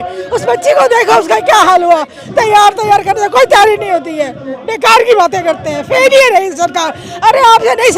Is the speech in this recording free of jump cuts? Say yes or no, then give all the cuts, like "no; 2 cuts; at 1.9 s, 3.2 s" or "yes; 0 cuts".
yes; 0 cuts